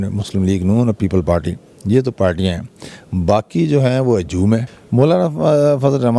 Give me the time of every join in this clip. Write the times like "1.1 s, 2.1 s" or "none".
4.8 s